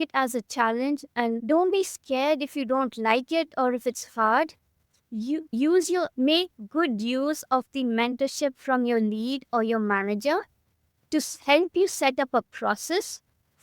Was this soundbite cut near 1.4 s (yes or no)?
yes